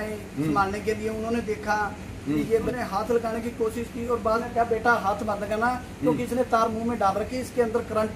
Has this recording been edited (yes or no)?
yes